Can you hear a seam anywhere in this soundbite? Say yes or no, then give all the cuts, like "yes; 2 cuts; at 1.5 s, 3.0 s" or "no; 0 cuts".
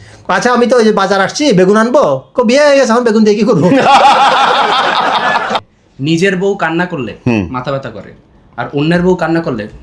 yes; 1 cut; at 5.7 s